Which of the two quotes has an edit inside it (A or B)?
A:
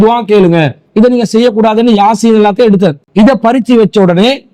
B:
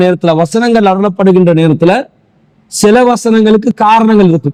A